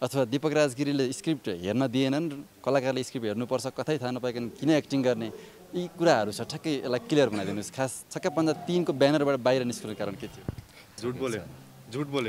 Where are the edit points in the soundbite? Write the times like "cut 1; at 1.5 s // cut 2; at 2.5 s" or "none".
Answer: cut 1; at 10.9 s